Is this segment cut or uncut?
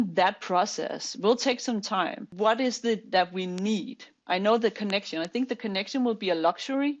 cut